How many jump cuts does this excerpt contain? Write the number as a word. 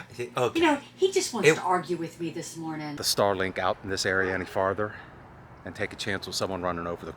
one